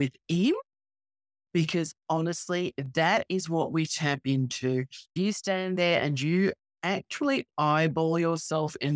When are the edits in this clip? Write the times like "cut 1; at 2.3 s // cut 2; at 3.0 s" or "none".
cut 1; at 5.1 s